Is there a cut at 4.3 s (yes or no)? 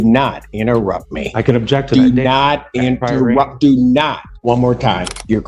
yes